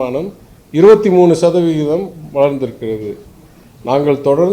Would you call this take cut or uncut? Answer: uncut